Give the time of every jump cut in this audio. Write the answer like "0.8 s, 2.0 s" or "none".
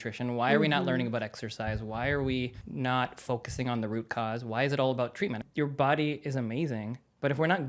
2.6 s, 5.4 s